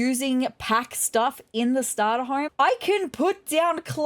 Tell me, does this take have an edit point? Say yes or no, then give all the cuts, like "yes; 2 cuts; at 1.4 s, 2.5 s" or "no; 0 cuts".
yes; 1 cut; at 2.5 s